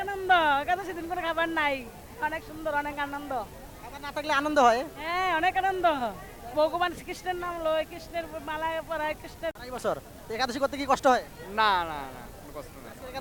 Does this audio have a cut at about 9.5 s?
yes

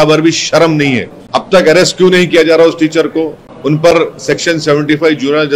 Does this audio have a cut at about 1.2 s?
yes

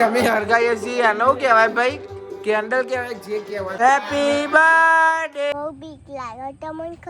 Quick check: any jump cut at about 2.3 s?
no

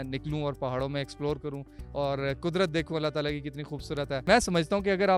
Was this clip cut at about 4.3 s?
yes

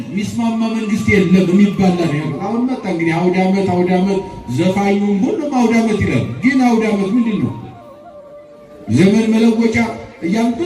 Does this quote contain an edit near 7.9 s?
no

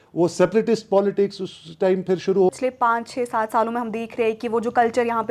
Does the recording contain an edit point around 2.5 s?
yes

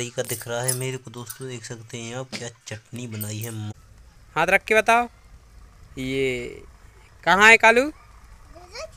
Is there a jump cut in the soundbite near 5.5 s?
no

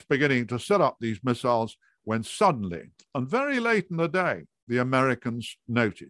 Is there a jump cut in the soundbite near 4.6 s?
no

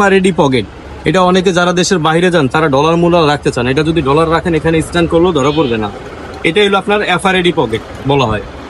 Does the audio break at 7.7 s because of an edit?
no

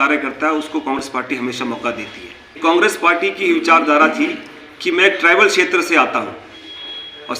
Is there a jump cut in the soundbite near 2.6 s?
yes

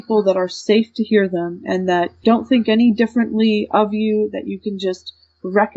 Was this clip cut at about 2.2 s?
yes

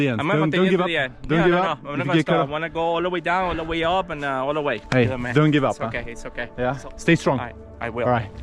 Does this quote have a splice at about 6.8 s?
yes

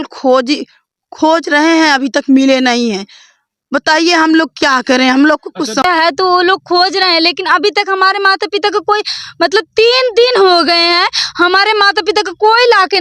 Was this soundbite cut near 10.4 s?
no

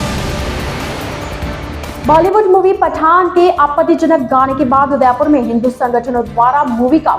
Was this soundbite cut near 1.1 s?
yes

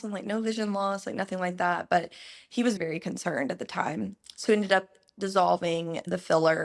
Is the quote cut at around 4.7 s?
no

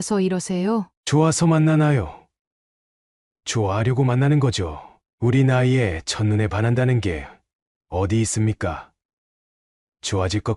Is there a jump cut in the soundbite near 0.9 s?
yes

